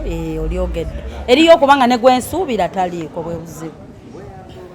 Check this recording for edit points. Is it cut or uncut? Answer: uncut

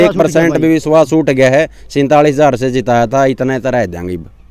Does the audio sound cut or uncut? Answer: uncut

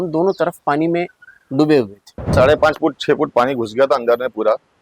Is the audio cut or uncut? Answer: cut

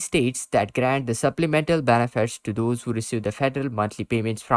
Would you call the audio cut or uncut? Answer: uncut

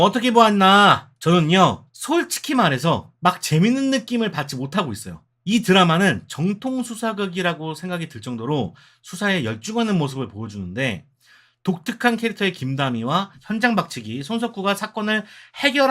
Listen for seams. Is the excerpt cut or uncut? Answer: cut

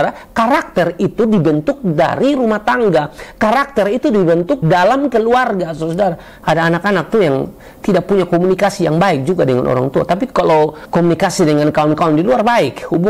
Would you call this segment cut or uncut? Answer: cut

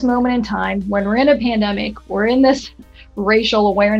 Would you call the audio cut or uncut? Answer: uncut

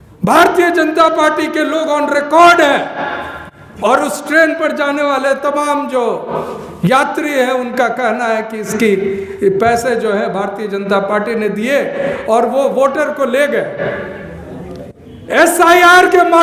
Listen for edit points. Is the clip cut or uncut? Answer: uncut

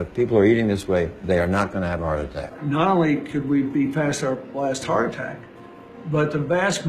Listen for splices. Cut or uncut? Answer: cut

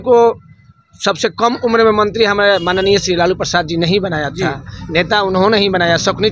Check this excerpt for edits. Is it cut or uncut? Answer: uncut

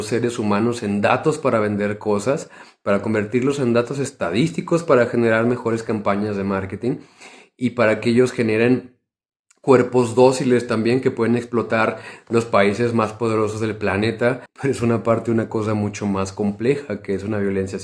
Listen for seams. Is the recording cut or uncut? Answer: cut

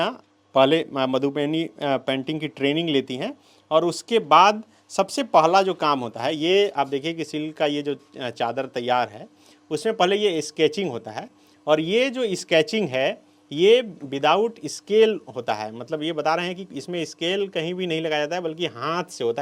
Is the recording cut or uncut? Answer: uncut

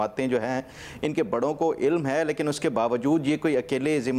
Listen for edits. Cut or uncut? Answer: uncut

